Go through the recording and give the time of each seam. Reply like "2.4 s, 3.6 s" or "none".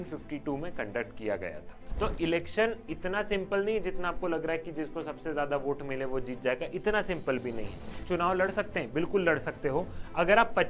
1.8 s, 7.9 s